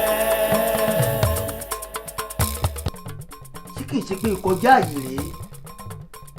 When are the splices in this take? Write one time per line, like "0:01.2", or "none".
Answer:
0:02.9